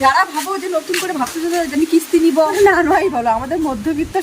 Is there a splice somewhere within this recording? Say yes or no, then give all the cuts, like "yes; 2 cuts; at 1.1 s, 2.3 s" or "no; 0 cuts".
yes; 1 cut; at 2.5 s